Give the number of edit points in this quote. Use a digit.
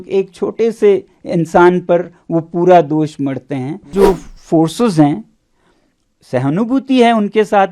1